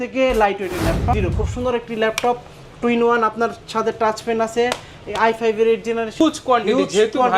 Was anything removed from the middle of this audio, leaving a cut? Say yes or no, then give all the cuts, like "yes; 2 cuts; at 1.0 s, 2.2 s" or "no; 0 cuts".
yes; 2 cuts; at 1.1 s, 6.2 s